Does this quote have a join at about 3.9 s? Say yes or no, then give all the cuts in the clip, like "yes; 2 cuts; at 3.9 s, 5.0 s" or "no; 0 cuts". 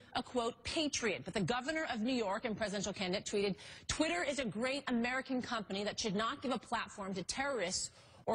no; 1 cut; at 6.6 s